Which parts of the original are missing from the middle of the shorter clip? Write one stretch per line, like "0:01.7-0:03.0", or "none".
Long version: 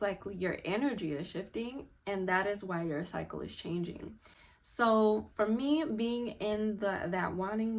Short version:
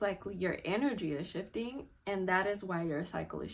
none